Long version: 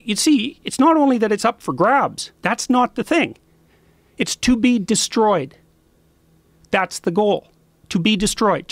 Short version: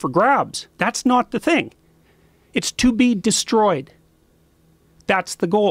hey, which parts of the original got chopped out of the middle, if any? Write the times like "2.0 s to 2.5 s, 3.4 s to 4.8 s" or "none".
none